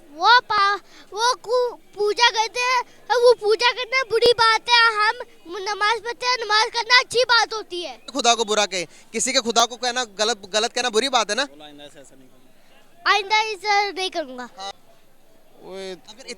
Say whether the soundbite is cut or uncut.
cut